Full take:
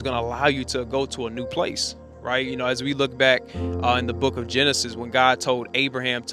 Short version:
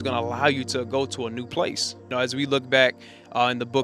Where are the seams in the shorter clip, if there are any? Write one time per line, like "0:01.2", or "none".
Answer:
0:02.1